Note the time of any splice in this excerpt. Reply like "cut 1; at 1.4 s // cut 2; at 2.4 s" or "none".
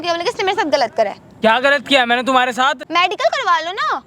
cut 1; at 1.2 s // cut 2; at 2.8 s